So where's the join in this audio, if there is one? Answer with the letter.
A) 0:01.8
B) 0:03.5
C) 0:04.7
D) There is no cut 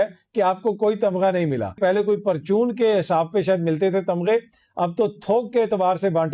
A